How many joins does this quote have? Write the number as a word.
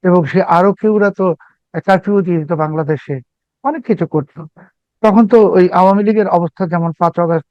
zero